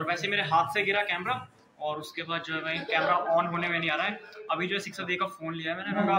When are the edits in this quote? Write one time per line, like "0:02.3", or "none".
none